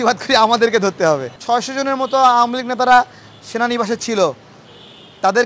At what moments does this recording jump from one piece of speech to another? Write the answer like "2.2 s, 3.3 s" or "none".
1.3 s